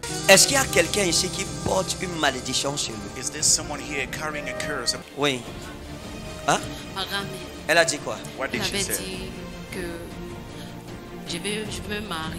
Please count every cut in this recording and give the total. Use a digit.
1